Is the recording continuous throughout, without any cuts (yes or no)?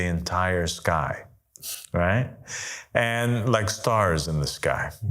yes